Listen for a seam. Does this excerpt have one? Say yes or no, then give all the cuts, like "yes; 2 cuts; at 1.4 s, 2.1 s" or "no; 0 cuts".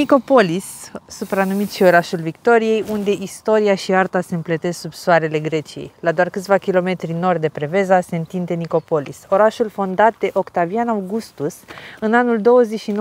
no; 0 cuts